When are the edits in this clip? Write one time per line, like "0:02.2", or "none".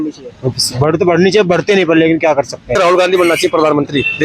0:02.7

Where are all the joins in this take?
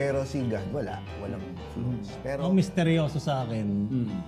0:02.4

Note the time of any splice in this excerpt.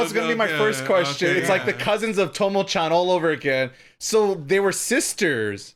none

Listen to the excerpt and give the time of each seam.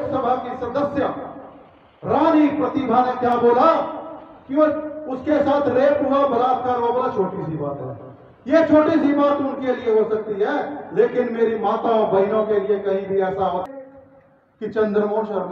0:13.6

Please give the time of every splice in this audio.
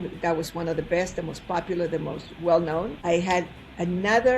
0:02.9

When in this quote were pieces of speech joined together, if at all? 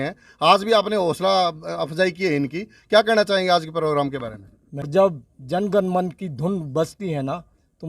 0:04.9

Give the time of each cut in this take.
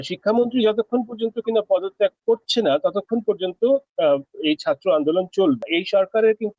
0:05.7

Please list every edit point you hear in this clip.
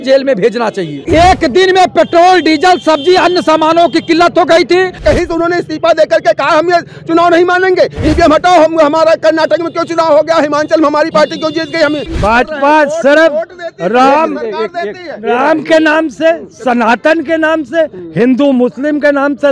0:01.0
0:05.0
0:12.0

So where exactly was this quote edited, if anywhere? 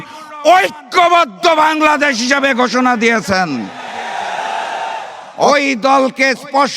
0:05.5

